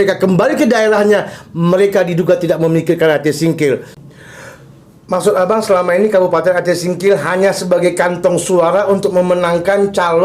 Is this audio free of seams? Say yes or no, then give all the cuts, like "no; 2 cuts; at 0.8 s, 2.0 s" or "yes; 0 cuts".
no; 1 cut; at 3.9 s